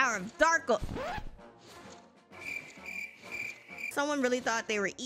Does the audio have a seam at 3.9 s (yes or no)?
yes